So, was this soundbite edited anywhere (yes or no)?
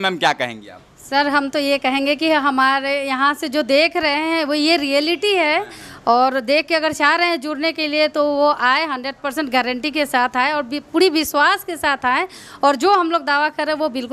no